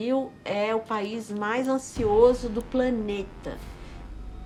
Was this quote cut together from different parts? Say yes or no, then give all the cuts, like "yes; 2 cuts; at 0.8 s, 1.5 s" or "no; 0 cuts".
no; 0 cuts